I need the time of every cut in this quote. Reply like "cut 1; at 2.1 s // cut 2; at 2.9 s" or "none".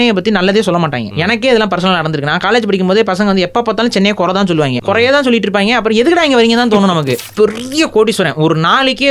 cut 1; at 1.1 s // cut 2; at 4.7 s // cut 3; at 7.2 s